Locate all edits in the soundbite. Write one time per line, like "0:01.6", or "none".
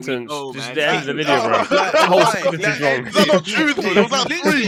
none

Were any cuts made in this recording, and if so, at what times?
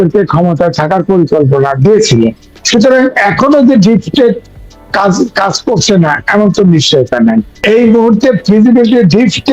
0:07.5

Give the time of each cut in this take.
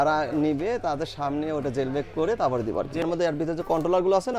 0:03.0

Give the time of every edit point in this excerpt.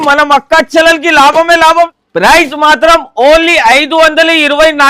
0:01.9

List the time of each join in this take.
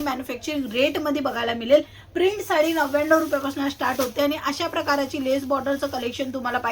none

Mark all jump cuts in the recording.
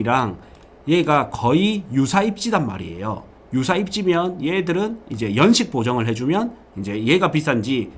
none

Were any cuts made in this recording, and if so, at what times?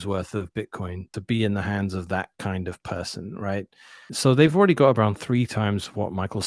0:01.1
0:04.1

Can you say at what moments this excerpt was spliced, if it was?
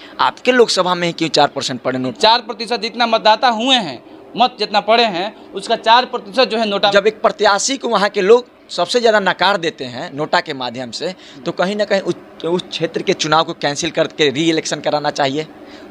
0:02.1
0:06.9

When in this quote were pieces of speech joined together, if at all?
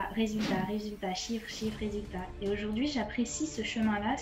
none

